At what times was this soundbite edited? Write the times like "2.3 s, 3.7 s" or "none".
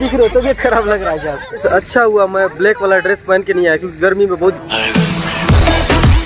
1.5 s, 4.6 s